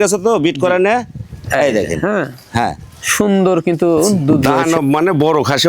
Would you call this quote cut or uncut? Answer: cut